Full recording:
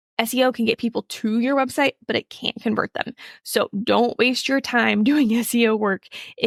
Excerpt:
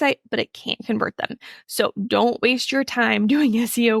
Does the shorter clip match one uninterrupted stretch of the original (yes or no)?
yes